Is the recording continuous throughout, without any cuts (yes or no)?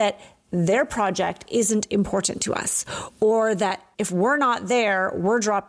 no